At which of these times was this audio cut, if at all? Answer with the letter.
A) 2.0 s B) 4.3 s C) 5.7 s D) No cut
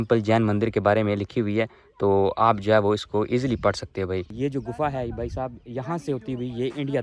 B